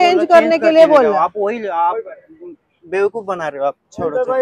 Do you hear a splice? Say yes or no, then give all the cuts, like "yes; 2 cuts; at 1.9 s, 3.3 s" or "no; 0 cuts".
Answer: no; 0 cuts